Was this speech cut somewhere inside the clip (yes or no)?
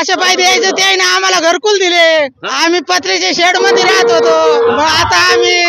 yes